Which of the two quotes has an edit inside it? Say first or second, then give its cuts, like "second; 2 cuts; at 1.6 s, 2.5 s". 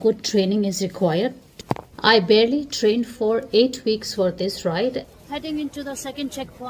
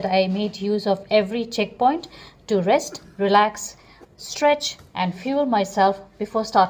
first; 2 cuts; at 1.4 s, 5.1 s